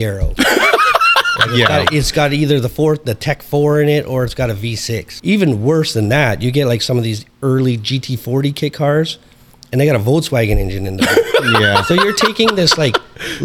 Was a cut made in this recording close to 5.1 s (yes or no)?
yes